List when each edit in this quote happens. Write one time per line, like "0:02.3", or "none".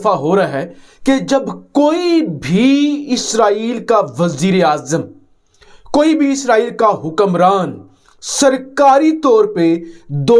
none